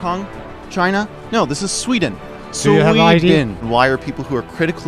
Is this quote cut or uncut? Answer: cut